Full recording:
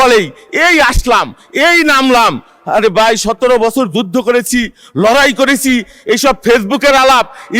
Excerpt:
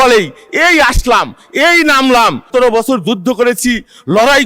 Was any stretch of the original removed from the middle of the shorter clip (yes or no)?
yes